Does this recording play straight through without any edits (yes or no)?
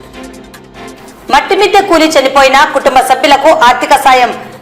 no